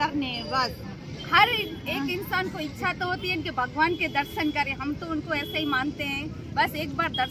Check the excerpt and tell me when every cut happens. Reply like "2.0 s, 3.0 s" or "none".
none

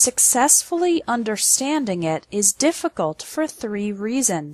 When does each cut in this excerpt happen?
3.2 s

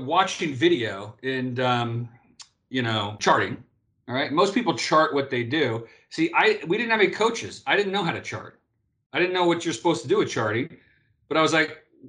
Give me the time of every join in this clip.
3.2 s

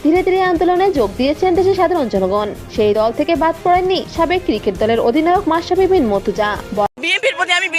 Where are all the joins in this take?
6.9 s

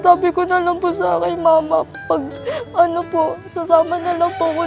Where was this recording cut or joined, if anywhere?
none

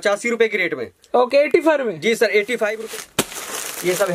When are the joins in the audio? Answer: 2.8 s

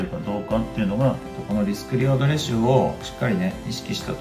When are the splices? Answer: 1.2 s

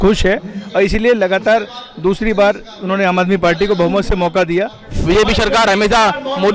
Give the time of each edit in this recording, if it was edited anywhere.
5.0 s

